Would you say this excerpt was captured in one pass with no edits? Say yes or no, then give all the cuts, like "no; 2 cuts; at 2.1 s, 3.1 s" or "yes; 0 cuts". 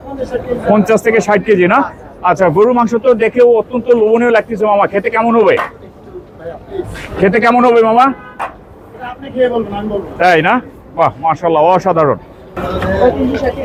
yes; 0 cuts